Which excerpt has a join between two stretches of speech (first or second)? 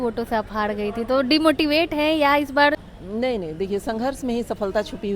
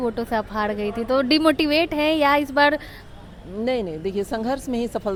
first